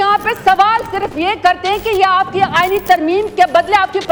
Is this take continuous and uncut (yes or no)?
yes